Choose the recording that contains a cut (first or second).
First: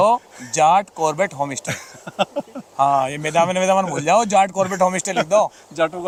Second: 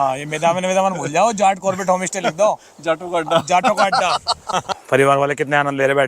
second